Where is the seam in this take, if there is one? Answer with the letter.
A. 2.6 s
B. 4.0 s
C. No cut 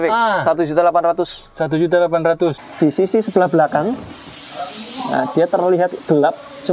A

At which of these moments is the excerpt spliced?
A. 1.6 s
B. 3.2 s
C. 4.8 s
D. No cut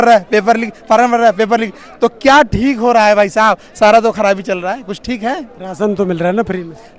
D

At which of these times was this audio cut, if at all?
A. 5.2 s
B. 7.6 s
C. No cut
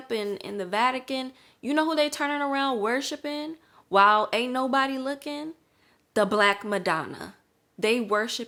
C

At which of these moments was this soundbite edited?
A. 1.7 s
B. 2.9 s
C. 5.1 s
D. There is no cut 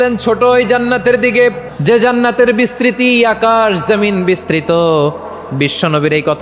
A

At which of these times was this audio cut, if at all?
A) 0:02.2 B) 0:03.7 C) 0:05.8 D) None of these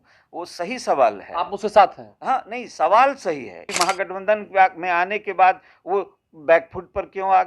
B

